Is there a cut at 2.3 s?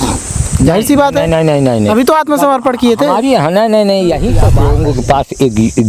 no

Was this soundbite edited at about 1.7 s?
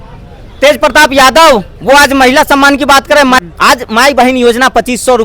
no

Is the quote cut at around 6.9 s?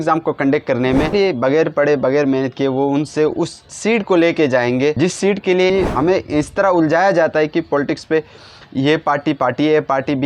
no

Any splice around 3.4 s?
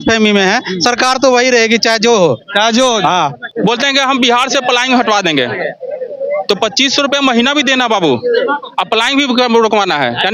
yes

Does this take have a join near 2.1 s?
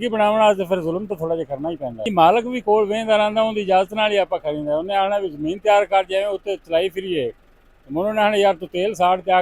yes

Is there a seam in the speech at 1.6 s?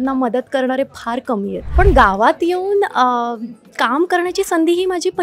yes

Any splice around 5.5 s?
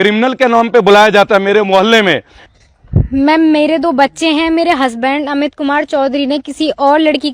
no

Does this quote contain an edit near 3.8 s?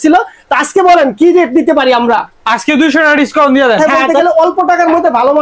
yes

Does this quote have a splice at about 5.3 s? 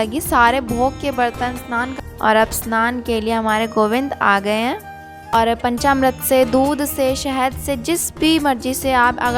yes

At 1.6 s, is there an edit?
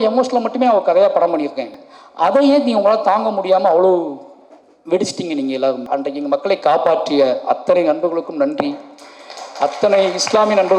yes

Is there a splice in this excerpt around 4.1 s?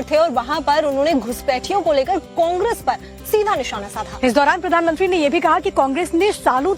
no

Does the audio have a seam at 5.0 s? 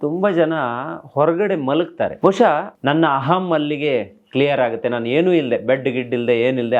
no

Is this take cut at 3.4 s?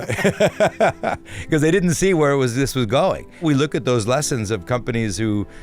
yes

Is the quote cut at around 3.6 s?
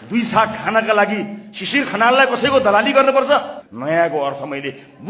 yes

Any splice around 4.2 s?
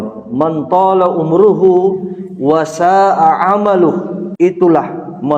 yes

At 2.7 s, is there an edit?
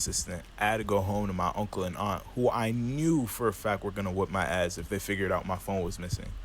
no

